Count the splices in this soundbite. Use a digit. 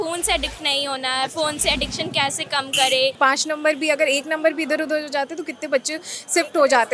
1